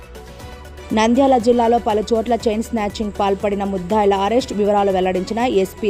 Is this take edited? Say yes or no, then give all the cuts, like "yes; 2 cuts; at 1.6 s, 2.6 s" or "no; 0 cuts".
no; 0 cuts